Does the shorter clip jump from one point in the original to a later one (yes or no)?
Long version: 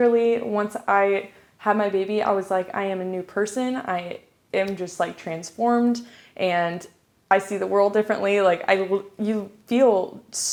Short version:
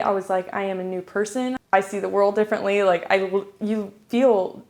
yes